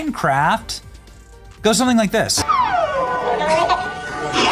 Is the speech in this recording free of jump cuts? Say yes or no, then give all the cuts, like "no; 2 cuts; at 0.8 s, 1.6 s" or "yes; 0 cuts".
no; 1 cut; at 2.4 s